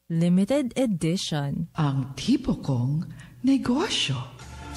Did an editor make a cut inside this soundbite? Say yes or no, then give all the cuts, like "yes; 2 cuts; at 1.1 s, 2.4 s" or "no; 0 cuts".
no; 0 cuts